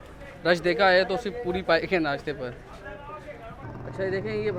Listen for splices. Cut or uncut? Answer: uncut